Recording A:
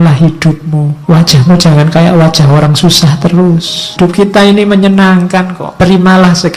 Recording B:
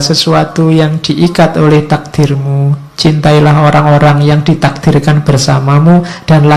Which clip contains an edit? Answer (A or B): A